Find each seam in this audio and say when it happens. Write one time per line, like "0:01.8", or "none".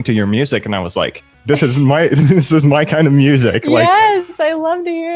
0:01.3

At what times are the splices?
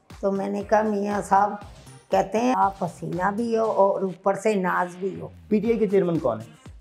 0:02.5
0:05.4

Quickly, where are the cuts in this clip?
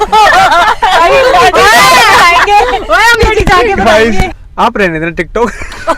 0:04.3

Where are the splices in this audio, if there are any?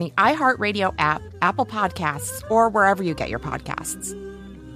0:03.8

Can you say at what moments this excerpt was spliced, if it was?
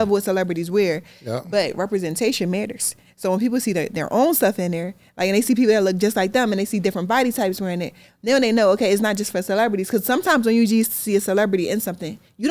none

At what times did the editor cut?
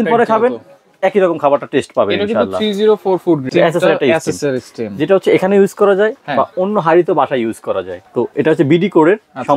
0:03.4
0:07.9

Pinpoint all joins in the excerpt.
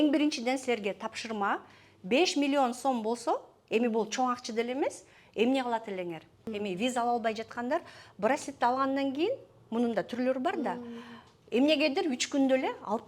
0:06.5

